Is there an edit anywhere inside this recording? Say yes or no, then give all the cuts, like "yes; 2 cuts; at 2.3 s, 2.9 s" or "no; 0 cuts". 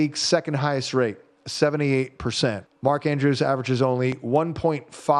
yes; 1 cut; at 2.7 s